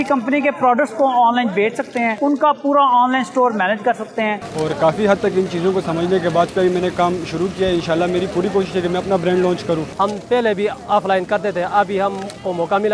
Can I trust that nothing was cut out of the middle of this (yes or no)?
no